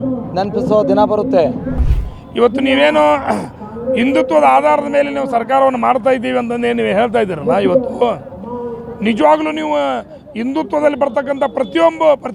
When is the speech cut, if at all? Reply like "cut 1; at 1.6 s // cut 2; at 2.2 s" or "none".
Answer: cut 1; at 1.9 s